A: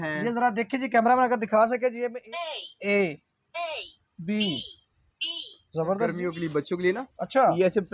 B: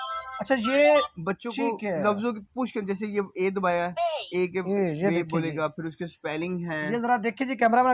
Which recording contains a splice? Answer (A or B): A